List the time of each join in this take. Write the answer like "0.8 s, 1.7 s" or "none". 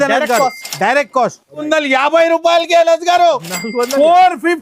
1.6 s